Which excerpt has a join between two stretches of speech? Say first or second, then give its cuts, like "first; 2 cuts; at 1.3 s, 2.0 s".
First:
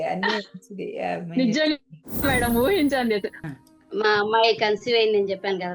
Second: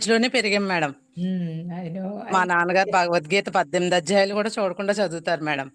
first; 1 cut; at 3.3 s